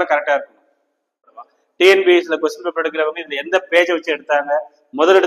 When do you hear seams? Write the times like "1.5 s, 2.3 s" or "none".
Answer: 1.2 s